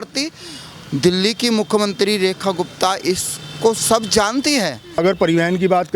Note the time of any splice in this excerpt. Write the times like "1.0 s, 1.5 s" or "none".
5.0 s

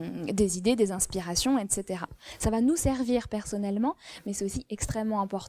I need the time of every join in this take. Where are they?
2.2 s

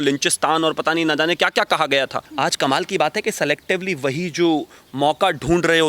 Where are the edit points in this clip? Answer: 2.2 s

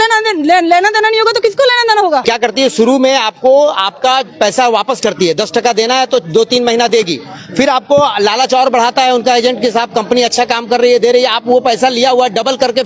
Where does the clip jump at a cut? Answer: 2.2 s

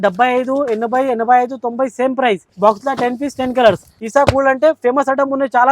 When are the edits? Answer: 2.5 s, 3.9 s

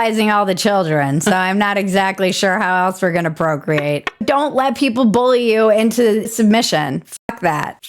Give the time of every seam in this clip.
4.2 s, 6.3 s

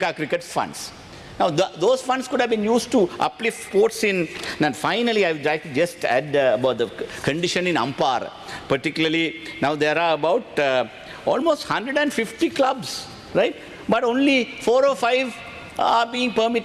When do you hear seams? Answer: none

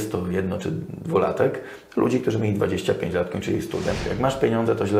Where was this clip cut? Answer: 3.9 s

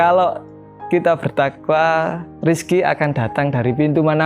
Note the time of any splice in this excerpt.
2.3 s

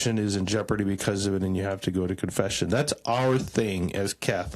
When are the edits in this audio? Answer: none

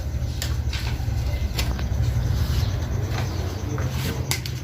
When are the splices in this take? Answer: 1.5 s

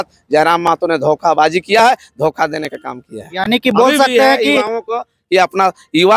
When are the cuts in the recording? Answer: none

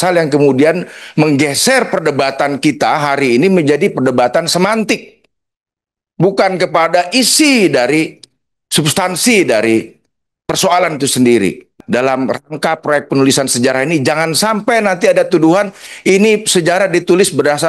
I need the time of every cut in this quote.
11.7 s

